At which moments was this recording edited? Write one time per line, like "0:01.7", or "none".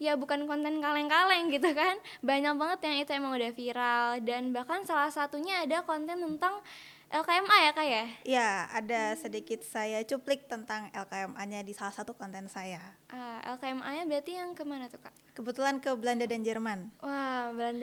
none